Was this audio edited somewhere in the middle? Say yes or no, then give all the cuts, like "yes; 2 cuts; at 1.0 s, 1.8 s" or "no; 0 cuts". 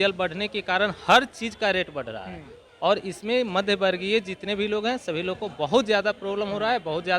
no; 0 cuts